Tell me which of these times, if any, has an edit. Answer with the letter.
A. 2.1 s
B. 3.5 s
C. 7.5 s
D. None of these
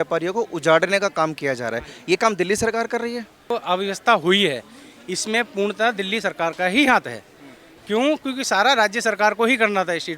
B